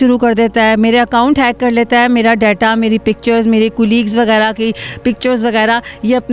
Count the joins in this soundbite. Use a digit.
0